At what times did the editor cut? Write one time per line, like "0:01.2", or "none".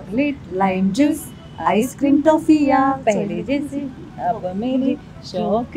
none